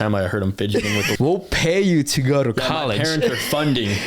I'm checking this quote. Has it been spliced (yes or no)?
yes